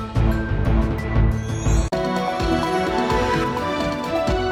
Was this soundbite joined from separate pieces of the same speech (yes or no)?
no